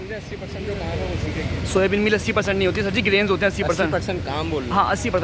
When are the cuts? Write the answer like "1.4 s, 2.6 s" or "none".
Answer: none